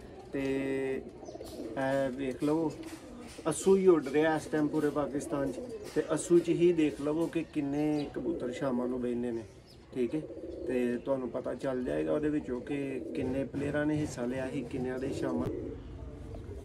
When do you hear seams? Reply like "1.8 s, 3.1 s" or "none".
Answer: 15.5 s